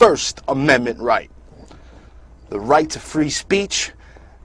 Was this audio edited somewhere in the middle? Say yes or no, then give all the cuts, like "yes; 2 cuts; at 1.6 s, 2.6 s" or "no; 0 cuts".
yes; 1 cut; at 1.9 s